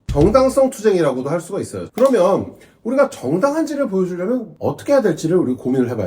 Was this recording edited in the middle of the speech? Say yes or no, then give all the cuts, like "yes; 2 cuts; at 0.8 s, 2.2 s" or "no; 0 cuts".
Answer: yes; 2 cuts; at 1.8 s, 4.5 s